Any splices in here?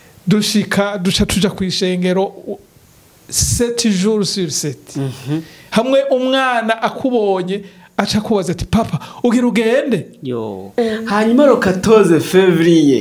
yes; 1 cut; at 10.7 s

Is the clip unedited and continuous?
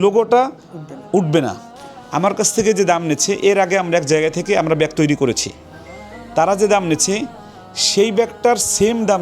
no; 1 cut; at 1.7 s

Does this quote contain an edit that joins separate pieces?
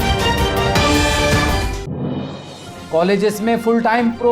yes; 1 cut; at 2.7 s

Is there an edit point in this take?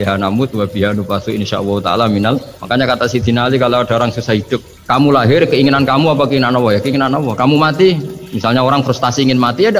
yes; 2 cuts; at 2.5 s, 4.7 s

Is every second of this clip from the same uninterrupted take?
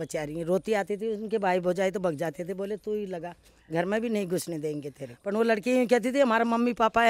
yes; 0 cuts

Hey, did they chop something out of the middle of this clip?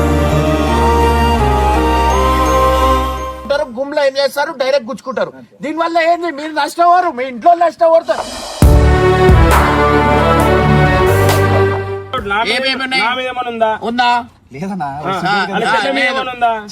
yes; 2 cuts; at 3.4 s, 12.1 s

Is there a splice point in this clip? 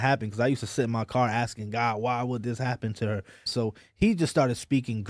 yes; 1 cut; at 3.5 s

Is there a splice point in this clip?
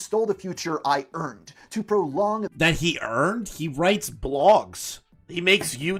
no; 0 cuts

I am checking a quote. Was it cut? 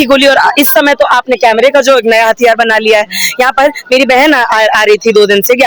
no; 0 cuts

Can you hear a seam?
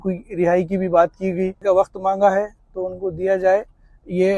yes; 1 cut; at 1.6 s

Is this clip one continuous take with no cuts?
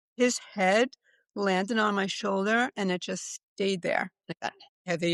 yes; 0 cuts

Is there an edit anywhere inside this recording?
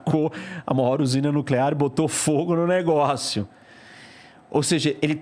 no; 0 cuts

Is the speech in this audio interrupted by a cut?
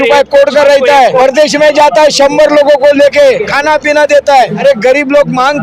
yes; 3 cuts; at 1.2 s, 3.5 s, 4.5 s

